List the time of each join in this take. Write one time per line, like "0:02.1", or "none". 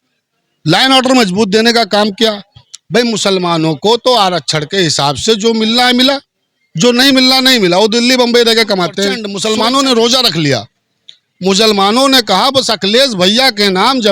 0:09.3